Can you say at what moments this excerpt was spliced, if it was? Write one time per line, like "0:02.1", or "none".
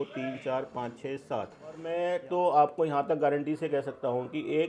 0:01.9